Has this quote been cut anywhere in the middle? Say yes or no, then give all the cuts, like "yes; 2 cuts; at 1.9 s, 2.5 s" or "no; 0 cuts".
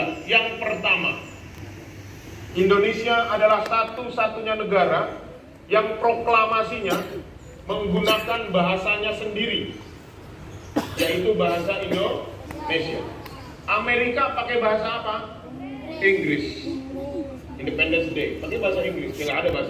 no; 0 cuts